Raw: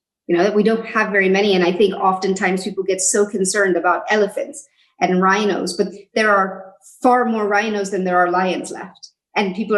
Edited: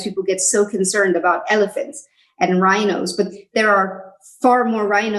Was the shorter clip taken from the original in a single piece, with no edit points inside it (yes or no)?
yes